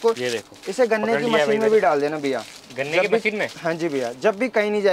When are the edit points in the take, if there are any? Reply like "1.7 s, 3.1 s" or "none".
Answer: none